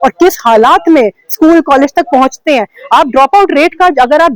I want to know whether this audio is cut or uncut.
uncut